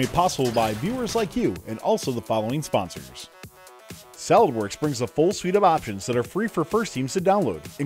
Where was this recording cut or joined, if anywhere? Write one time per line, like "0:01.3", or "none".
0:03.7